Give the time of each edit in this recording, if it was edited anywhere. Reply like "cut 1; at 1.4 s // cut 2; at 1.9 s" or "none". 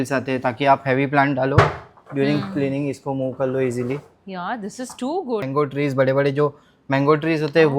cut 1; at 5.5 s